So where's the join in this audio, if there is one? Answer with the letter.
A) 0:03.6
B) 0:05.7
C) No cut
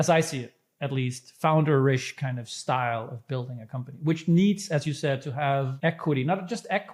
B